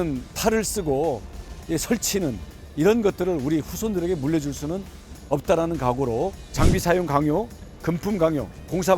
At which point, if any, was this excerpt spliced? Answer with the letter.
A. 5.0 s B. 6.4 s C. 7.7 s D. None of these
B